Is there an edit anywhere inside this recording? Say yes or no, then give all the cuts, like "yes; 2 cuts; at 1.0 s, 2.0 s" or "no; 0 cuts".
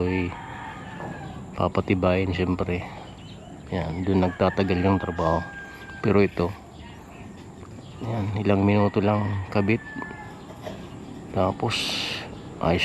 no; 0 cuts